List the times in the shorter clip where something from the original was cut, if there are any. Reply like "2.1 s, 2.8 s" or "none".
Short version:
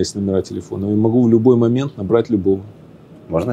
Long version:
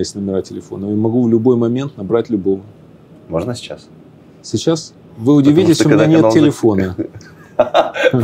none